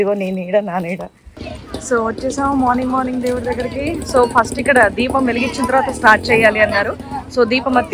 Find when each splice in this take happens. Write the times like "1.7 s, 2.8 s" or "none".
1.4 s